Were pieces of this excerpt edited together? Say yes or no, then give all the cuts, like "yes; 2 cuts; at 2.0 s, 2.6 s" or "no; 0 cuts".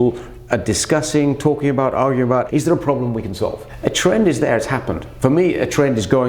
yes; 3 cuts; at 2.5 s, 3.7 s, 5.0 s